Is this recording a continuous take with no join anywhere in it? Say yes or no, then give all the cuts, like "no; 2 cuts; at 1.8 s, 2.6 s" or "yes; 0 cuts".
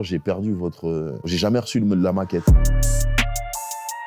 no; 1 cut; at 2.4 s